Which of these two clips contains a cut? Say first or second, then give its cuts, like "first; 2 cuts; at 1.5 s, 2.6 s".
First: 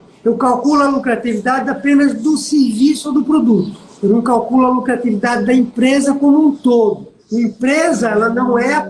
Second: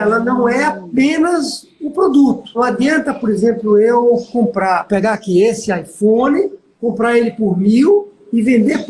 second; 2 cuts; at 2.6 s, 4.8 s